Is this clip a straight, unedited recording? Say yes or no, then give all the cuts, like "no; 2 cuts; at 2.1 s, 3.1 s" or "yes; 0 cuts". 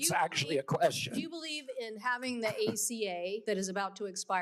no; 1 cut; at 3.4 s